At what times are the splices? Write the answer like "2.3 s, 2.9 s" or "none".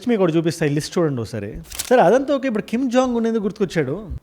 1.7 s

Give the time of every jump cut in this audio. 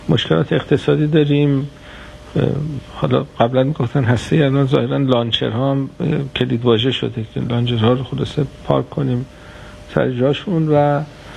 none

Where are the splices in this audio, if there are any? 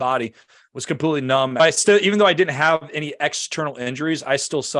1.6 s

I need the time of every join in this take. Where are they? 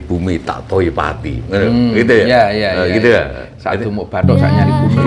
none

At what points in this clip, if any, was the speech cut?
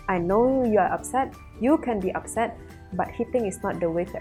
none

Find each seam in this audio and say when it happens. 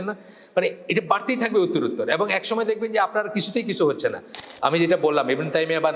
4.4 s

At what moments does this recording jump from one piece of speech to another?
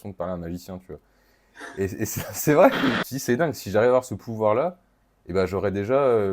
3.1 s

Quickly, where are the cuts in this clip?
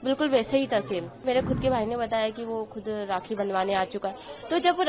1.2 s

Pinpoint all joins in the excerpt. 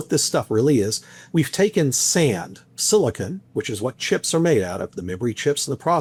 none

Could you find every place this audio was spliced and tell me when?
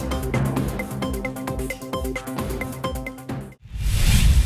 3.6 s

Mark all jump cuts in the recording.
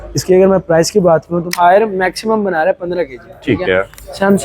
1.5 s

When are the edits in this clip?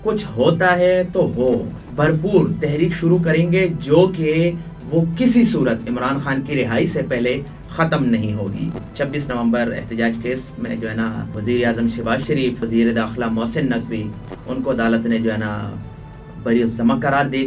1.8 s, 8.8 s, 11.3 s, 12.6 s

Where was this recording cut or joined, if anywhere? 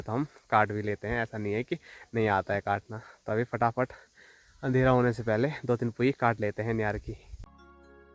none

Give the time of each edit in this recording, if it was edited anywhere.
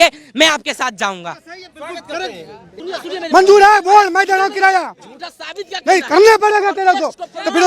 none

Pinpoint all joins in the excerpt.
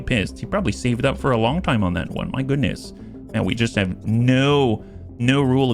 none

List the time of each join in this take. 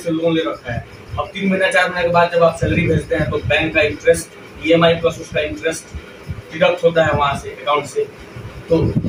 none

